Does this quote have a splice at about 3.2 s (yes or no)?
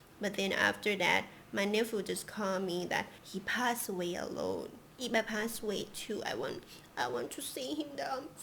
yes